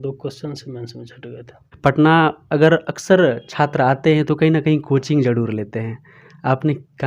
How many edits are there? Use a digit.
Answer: 1